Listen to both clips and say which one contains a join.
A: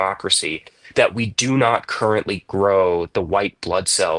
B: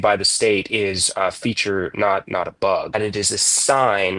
B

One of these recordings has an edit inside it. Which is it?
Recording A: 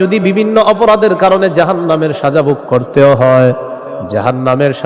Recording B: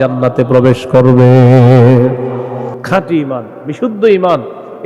B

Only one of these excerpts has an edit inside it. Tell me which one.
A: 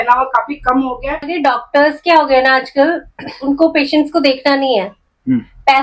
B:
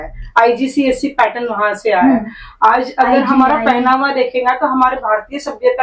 A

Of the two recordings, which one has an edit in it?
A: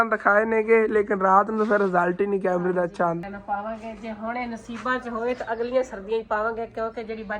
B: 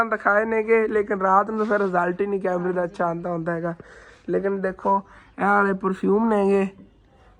A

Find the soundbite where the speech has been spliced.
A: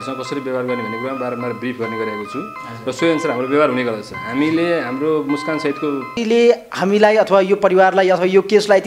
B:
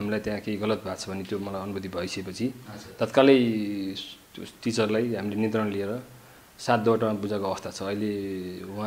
A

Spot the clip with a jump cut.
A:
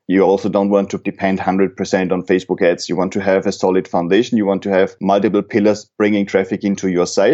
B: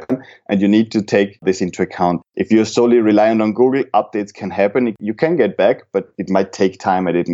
A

